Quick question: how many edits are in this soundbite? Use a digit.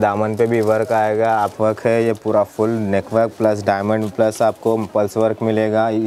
1